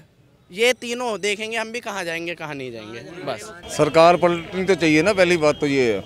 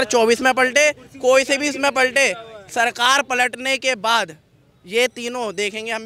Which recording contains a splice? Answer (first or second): first